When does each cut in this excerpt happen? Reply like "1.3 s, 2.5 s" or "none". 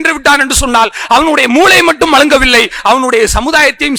none